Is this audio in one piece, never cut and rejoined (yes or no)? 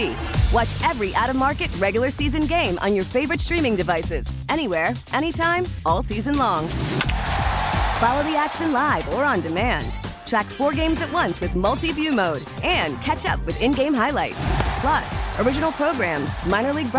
yes